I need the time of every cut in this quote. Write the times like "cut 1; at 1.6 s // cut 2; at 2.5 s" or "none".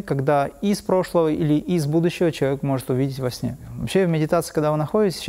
cut 1; at 3.7 s